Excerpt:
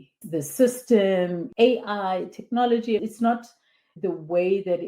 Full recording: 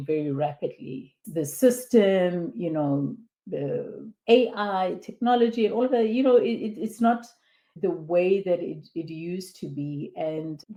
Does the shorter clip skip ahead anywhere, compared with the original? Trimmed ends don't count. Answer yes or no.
yes